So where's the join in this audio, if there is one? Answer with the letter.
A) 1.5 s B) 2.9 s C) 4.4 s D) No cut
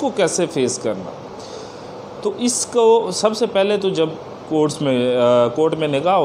D